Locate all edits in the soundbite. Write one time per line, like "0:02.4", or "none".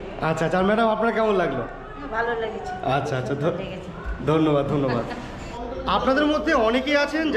none